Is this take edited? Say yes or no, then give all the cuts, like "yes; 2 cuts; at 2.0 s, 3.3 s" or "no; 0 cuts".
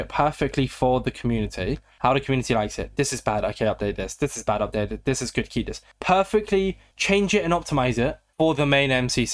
no; 0 cuts